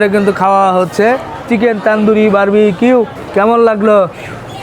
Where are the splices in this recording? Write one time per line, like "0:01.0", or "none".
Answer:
0:03.2

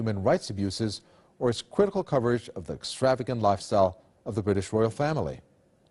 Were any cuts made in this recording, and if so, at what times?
none

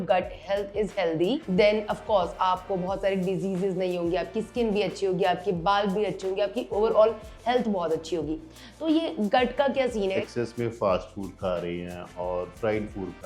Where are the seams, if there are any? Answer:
0:01.4
0:06.7
0:10.1

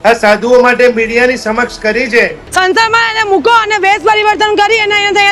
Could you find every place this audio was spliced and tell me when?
0:02.4

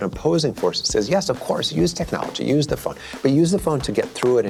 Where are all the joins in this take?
none

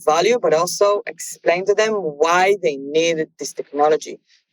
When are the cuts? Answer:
0:01.6

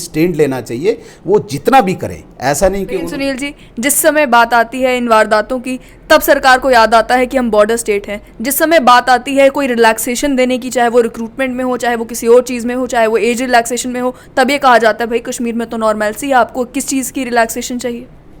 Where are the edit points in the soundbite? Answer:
none

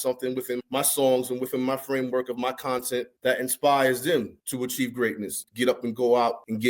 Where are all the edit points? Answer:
0:05.4

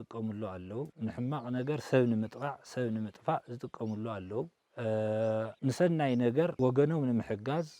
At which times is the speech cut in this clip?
0:00.9
0:04.6
0:05.5
0:06.5

